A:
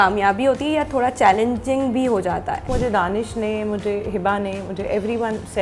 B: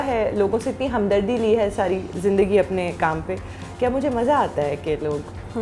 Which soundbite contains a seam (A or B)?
A